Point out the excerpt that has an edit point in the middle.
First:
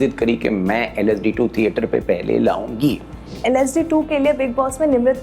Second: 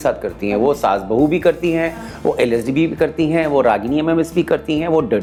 first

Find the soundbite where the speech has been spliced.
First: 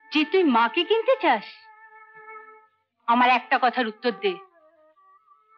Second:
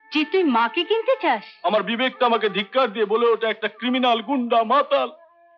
second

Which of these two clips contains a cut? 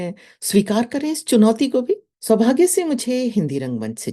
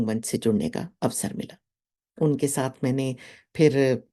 first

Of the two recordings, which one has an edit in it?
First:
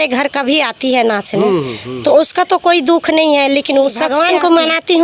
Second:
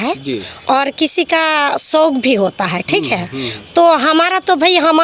first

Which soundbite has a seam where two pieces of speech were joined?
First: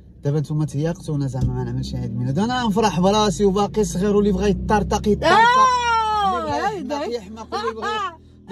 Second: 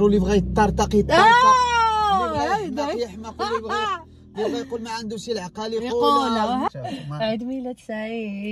second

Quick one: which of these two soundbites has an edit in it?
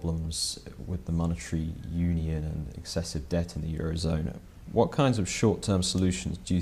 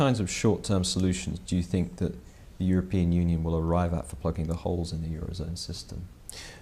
second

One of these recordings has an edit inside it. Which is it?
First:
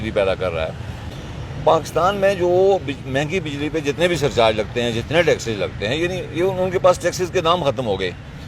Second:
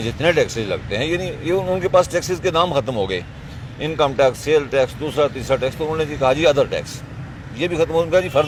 first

